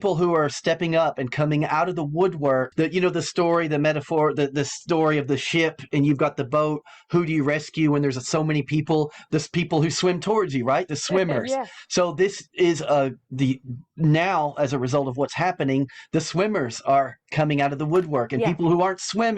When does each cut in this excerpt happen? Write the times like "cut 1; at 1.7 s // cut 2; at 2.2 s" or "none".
cut 1; at 2.7 s